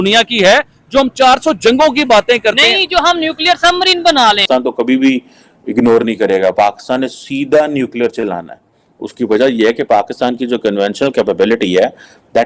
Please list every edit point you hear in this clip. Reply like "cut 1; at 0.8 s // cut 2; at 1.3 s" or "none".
cut 1; at 4.4 s